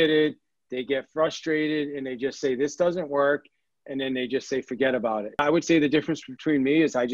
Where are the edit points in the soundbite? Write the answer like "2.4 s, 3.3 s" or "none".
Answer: 5.4 s